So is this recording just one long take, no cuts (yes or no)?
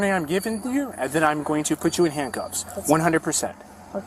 yes